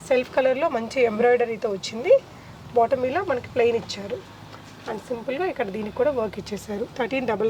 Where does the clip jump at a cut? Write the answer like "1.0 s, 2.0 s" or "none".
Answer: none